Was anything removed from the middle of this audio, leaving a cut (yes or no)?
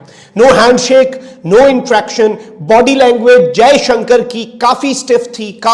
no